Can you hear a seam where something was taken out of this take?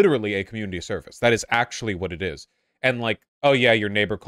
yes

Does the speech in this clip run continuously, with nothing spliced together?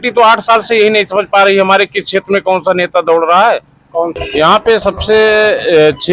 no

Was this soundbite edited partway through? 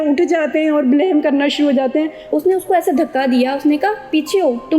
yes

